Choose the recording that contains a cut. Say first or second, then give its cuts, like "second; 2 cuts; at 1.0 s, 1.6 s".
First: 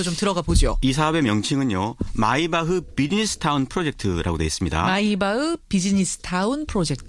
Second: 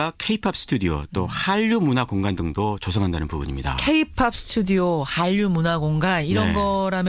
first; 1 cut; at 5.2 s